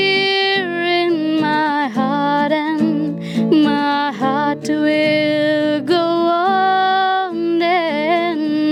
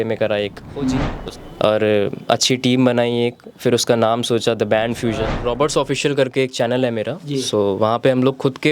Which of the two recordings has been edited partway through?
second; 2 cuts; at 1.1 s, 5.4 s

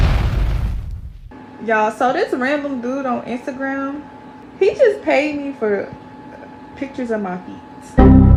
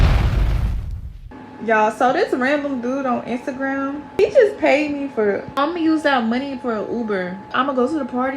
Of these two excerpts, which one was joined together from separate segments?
second; 3 cuts; at 4.2 s, 5.6 s, 7.5 s

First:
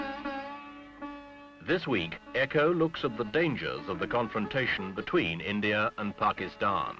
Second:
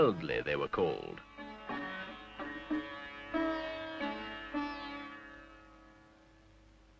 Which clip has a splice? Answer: second; 1 cut; at 2.3 s

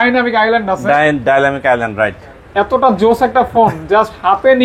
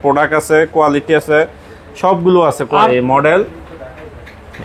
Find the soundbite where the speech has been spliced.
second; 1 cut; at 2.9 s

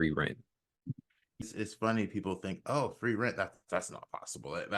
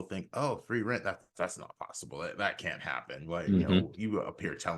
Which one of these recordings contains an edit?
first; 1 cut; at 1.4 s

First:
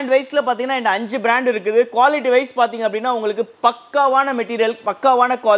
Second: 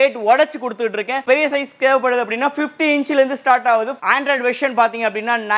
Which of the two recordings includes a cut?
second; 2 cuts; at 1.2 s, 4.0 s

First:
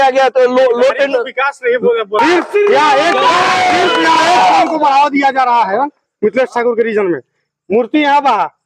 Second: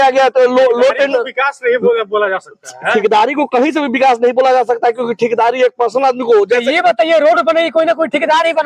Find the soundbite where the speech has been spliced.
first; 1 cut; at 2.2 s

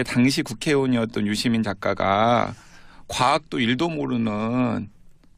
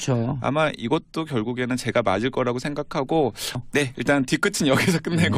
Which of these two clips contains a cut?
first; 1 cut; at 2.4 s

